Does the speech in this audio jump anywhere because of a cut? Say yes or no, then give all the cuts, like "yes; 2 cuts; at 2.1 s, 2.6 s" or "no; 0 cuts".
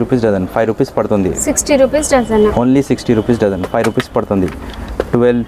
no; 0 cuts